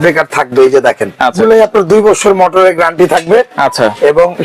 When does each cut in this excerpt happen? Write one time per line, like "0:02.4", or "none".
0:01.3